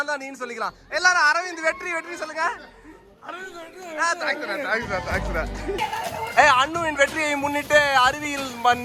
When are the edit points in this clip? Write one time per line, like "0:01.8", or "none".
0:05.8